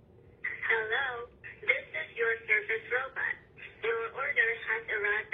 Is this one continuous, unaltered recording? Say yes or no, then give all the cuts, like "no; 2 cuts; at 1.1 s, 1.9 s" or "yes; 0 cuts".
yes; 0 cuts